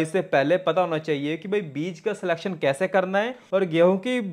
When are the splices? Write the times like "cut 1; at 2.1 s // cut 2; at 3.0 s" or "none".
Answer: none